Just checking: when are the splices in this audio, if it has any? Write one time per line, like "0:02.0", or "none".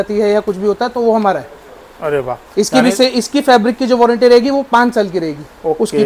none